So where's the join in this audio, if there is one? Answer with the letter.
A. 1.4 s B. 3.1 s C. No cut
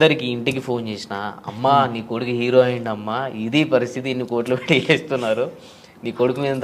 C